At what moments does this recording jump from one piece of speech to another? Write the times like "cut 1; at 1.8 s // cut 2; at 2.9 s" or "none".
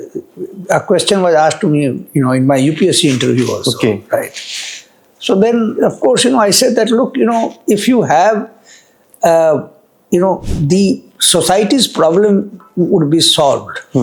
none